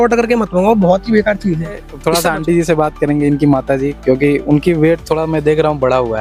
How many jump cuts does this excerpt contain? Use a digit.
0